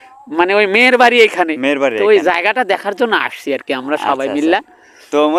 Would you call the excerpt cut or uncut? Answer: uncut